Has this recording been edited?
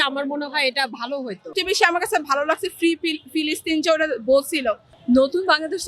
yes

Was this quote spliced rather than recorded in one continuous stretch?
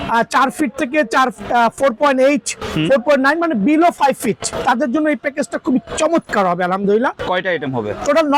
yes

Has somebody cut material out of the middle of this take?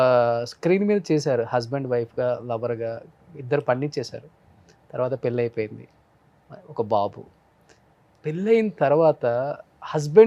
no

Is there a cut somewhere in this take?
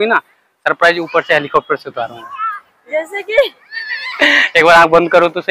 no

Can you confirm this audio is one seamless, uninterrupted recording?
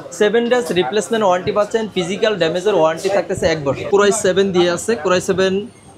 no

